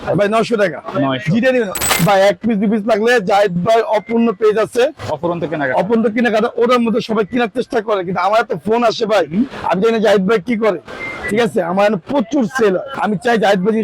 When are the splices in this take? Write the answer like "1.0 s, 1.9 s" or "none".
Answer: 1.8 s, 12.9 s